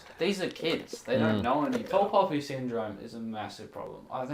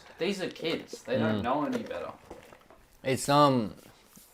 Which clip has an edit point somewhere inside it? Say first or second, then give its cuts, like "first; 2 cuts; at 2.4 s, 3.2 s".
first; 1 cut; at 1.9 s